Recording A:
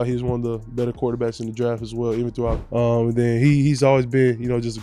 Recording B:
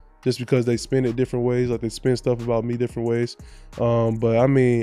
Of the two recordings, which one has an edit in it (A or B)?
A